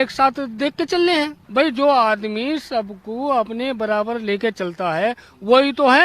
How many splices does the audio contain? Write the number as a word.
one